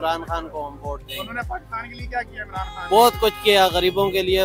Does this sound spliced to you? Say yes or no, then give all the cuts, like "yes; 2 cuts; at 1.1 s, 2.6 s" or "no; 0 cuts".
no; 0 cuts